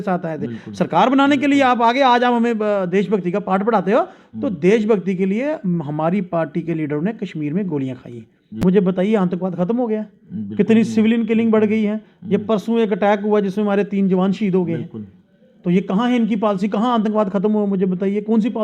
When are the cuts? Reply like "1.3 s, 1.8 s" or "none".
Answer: 8.6 s